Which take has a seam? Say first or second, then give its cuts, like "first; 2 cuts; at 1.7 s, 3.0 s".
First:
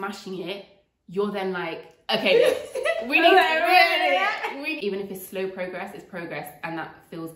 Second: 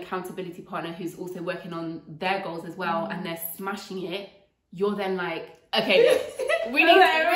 first; 1 cut; at 4.7 s